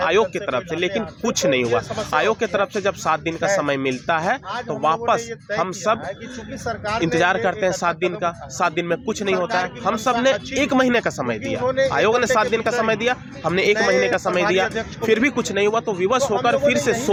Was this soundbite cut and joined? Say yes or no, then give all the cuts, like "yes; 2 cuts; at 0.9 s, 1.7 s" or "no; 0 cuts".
no; 0 cuts